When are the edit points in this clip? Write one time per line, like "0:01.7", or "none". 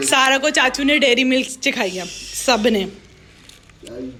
none